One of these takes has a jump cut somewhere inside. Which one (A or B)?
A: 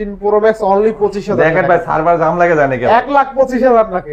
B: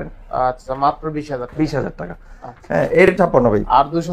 B